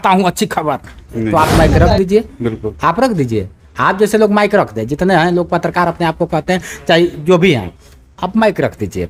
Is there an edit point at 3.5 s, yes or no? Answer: no